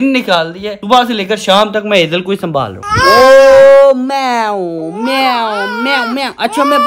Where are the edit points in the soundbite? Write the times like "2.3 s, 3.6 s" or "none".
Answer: 2.8 s